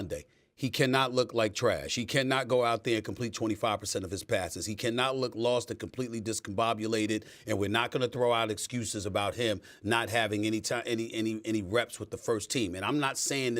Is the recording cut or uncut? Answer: uncut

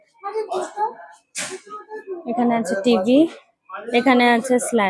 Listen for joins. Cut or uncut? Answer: uncut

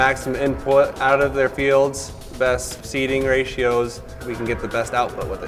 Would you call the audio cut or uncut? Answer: cut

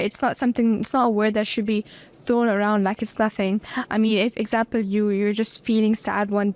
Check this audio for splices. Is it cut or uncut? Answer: uncut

